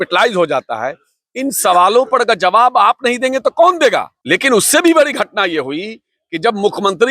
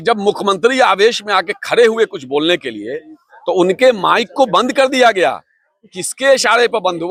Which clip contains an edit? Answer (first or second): first